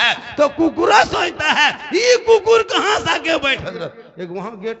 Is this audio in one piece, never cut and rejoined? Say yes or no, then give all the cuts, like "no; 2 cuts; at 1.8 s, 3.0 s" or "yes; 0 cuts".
no; 1 cut; at 3.6 s